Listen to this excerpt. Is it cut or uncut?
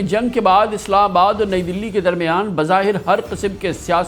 uncut